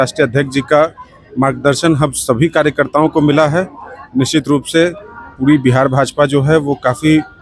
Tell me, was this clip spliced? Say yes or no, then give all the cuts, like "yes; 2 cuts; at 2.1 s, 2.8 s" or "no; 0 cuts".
no; 0 cuts